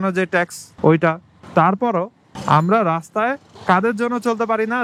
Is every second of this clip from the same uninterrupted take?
yes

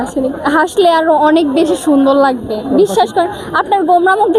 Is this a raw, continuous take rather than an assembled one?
no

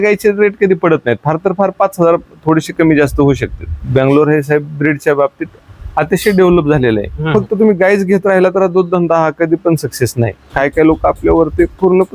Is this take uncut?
no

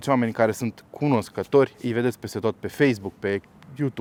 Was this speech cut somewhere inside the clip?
no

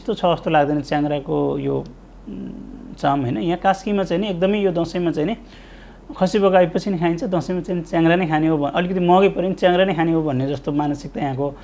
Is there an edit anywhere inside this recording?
no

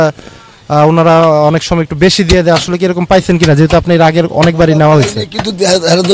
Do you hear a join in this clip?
no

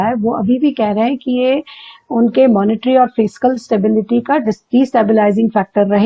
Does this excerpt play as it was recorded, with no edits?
yes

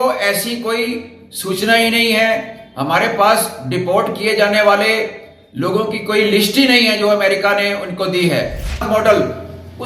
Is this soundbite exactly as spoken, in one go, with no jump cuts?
no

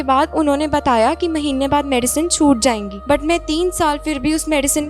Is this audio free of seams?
no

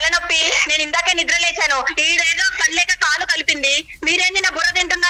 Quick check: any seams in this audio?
no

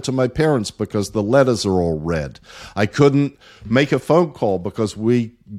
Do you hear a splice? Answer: no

